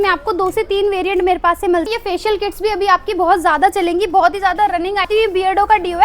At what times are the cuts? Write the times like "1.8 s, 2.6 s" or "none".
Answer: 1.8 s, 5.1 s